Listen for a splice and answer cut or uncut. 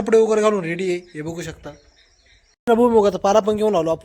cut